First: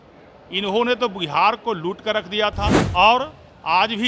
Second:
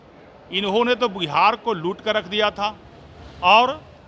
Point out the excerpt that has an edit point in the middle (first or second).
first